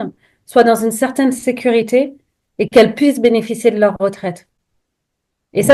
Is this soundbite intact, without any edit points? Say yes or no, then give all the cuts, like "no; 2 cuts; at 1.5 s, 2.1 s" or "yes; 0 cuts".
yes; 0 cuts